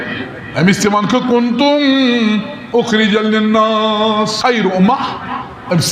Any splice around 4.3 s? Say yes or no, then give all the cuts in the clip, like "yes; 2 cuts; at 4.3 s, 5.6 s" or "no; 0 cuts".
yes; 1 cut; at 4.3 s